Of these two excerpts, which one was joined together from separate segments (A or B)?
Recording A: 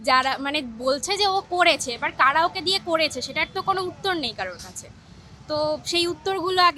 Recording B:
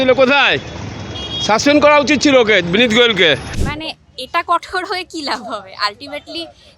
B